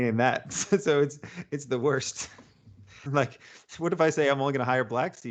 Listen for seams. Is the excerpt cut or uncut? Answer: cut